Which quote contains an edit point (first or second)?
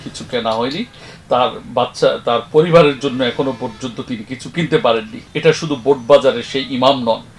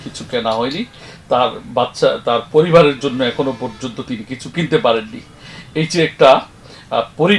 first